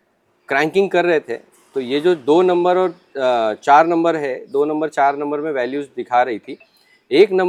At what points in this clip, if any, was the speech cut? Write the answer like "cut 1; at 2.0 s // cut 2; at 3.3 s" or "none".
none